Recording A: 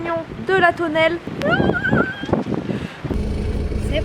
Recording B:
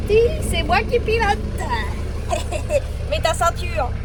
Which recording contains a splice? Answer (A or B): A